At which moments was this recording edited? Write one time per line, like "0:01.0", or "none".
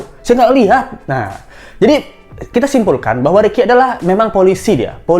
none

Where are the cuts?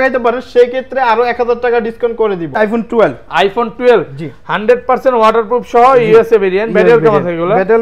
0:02.6

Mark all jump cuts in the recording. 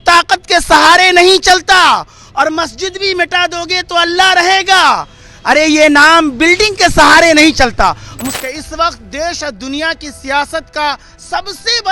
0:08.3

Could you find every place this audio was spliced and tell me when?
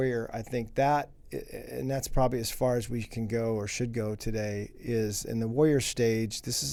none

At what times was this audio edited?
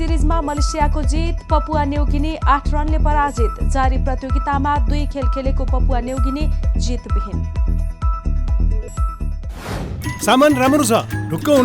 0:09.9

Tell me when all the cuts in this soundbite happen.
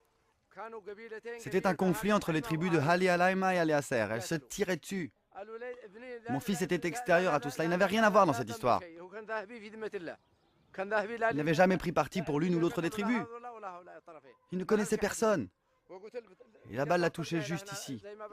0:04.6

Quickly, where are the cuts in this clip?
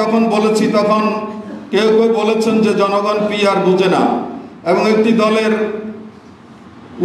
none

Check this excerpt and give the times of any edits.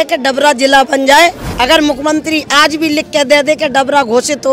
0:01.5

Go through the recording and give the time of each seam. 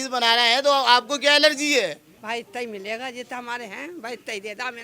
0:02.1

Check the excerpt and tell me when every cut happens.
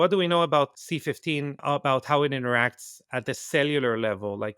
0:01.3

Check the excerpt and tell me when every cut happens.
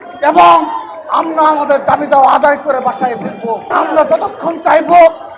0:03.7

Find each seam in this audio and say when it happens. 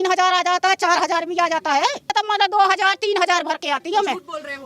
0:02.1

